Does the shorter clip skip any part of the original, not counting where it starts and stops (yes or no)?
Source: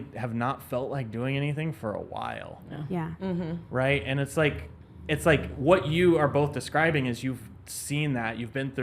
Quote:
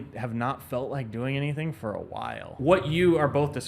yes